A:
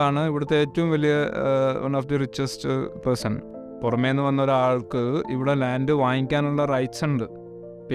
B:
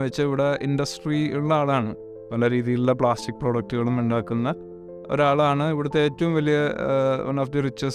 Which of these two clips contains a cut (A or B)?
A